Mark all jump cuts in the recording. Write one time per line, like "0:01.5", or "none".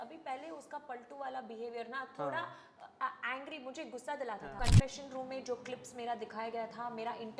0:04.6